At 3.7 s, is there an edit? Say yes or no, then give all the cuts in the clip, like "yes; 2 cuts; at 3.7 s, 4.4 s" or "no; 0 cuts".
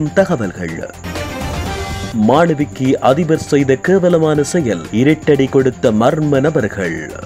no; 2 cuts; at 1.0 s, 2.1 s